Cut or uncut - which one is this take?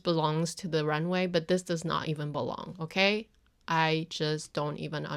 uncut